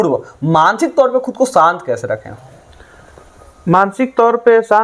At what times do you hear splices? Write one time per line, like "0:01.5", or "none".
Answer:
none